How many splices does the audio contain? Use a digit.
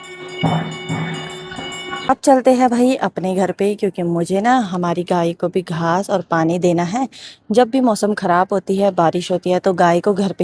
1